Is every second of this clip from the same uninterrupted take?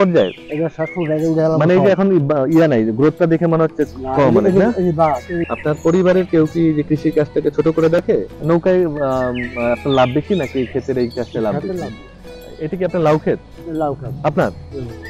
no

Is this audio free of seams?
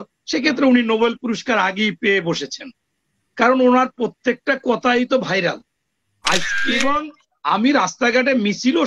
no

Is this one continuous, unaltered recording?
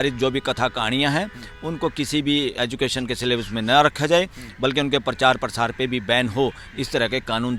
yes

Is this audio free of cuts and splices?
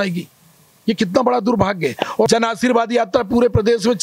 no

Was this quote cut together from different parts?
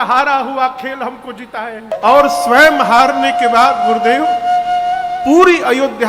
yes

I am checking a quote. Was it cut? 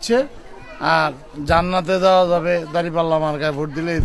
no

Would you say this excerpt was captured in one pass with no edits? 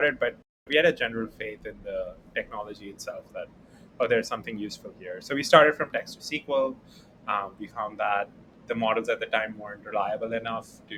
yes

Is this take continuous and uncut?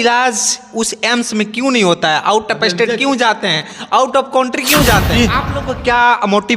no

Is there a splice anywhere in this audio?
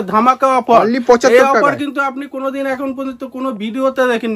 no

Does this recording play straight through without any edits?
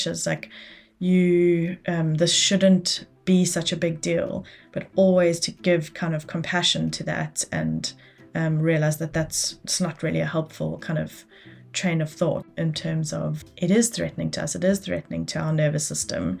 no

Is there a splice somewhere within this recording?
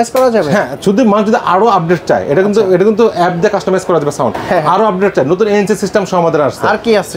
no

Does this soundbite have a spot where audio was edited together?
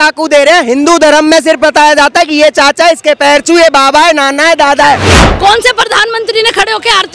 yes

